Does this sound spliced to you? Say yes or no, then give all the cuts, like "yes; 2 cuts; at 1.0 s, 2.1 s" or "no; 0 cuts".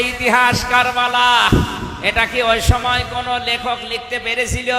no; 0 cuts